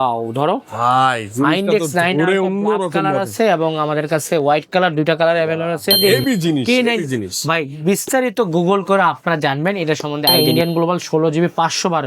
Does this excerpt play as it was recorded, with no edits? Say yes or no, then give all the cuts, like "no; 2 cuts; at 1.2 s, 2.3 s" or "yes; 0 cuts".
no; 2 cuts; at 6.0 s, 10.5 s